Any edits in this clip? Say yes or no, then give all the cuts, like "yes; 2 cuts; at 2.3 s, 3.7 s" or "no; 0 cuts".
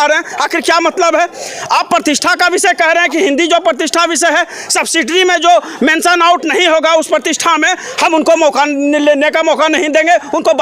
no; 0 cuts